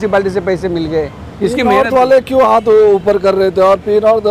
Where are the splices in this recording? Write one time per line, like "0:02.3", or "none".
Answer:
none